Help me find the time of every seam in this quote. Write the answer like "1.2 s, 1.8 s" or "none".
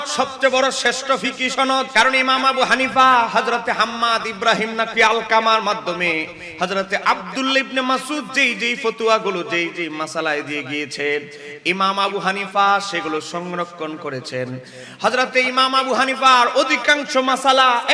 1.9 s